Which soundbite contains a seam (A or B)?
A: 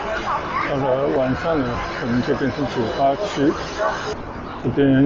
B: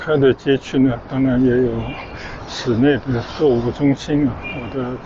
A